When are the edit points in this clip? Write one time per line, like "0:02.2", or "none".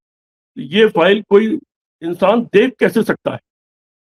none